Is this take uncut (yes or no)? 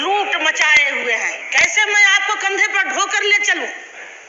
no